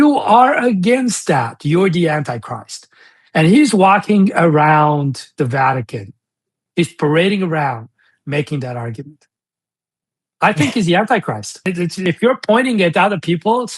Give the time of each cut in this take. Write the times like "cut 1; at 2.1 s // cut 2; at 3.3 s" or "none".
cut 1; at 12.0 s